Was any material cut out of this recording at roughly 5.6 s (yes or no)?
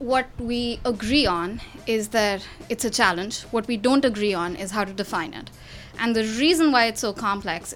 no